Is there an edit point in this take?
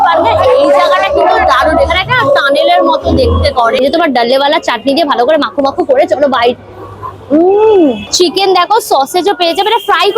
yes; 2 cuts; at 3.8 s, 8.2 s

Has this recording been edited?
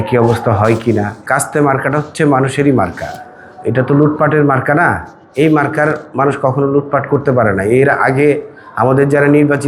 no; 0 cuts

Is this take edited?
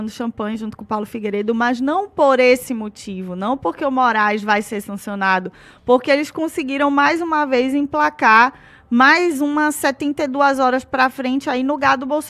no; 0 cuts

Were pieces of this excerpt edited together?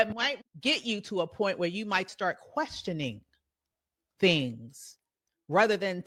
no; 0 cuts

